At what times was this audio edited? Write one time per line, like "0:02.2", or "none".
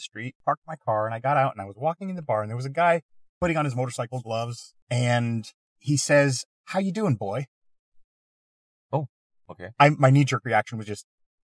none

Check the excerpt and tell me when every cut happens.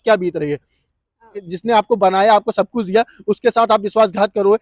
0:01.5

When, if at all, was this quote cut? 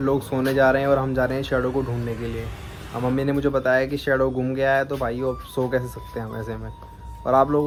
none

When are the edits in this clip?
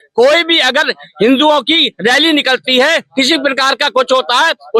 none

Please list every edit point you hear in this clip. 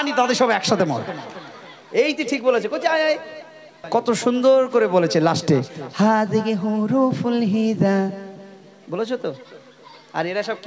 0:03.7

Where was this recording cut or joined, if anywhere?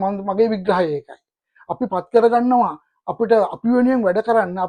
none

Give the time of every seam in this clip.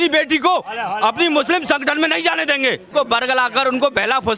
0:02.9

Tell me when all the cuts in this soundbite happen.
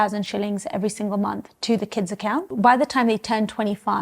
0:02.5

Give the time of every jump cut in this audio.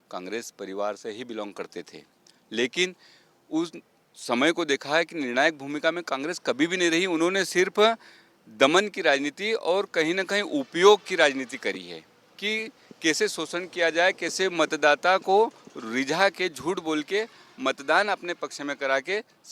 none

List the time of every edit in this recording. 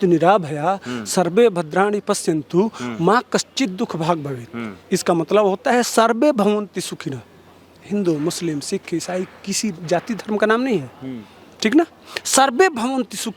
none

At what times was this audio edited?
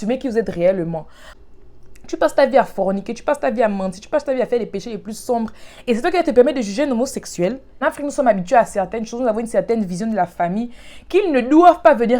0:01.2
0:07.7

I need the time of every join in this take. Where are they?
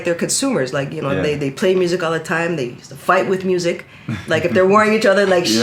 none

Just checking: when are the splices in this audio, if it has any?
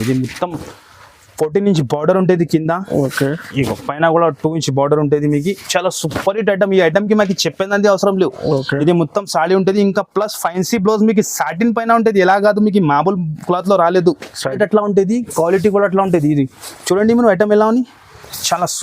0:14.6

